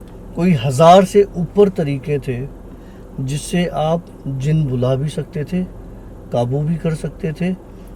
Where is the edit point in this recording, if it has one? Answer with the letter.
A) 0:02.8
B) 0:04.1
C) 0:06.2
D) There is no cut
D